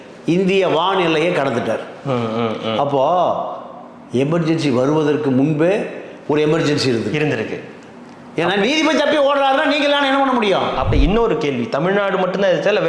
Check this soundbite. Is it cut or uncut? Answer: cut